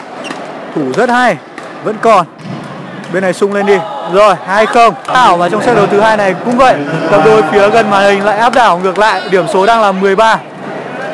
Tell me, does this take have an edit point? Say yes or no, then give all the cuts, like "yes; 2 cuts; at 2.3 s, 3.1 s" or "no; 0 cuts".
yes; 1 cut; at 5.1 s